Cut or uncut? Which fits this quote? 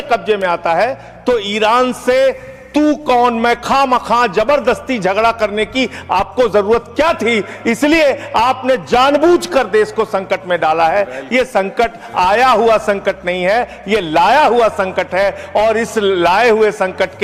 uncut